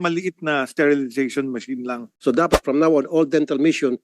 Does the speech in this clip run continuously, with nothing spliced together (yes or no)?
no